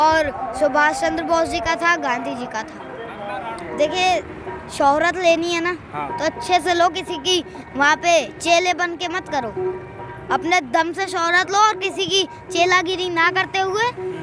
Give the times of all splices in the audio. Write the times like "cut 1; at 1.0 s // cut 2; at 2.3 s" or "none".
cut 1; at 3.6 s